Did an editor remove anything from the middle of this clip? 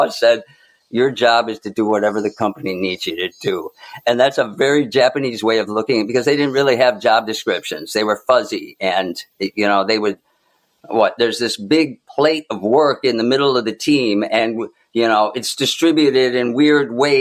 no; 0 cuts

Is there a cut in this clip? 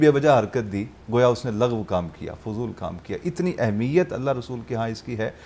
no; 0 cuts

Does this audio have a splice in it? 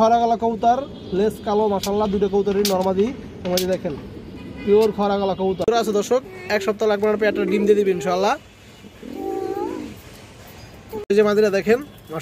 yes; 2 cuts; at 6.0 s, 11.1 s

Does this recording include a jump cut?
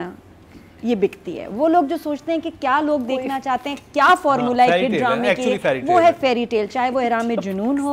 no; 0 cuts

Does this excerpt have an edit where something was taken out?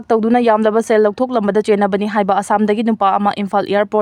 no; 0 cuts

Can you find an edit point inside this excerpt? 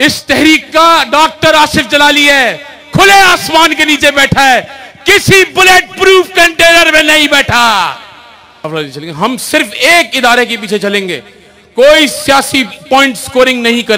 yes; 1 cut; at 8.5 s

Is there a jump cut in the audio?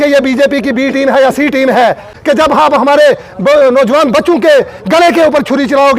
yes; 1 cut; at 2.1 s

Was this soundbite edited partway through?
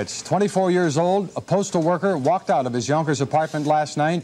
no; 0 cuts

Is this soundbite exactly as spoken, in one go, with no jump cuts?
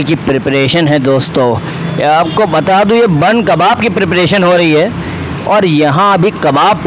yes; 0 cuts

